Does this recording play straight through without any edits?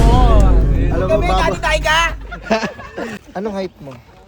no; 1 cut; at 3.1 s

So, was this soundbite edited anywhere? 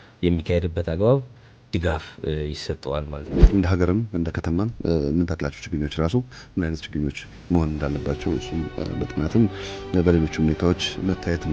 yes; 1 cut; at 3.3 s

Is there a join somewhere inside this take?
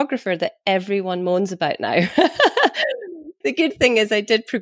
yes; 1 cut; at 2.9 s

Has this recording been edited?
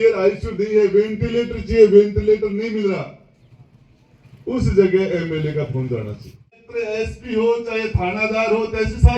yes; 1 cut; at 6.7 s

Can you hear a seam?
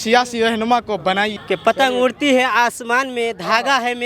yes; 1 cut; at 1.4 s

